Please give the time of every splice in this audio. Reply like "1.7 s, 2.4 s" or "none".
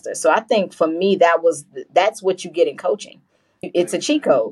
none